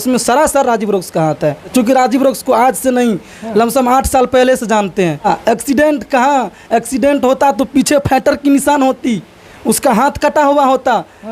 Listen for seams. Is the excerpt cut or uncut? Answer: cut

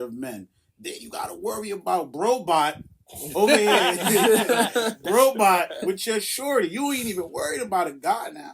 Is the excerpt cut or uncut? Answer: cut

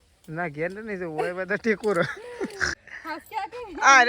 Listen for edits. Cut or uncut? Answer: cut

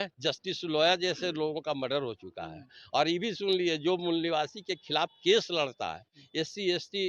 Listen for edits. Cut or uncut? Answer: uncut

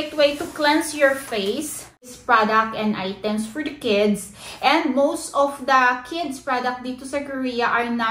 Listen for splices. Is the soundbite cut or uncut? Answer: cut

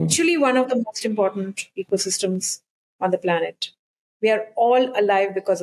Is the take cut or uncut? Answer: uncut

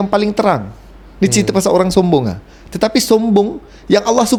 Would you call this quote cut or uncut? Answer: uncut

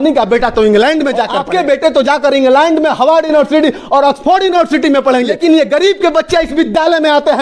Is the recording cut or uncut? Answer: cut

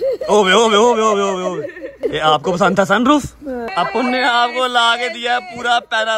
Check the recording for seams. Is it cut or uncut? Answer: cut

